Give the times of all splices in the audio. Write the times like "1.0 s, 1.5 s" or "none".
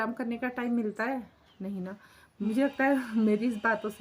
2.3 s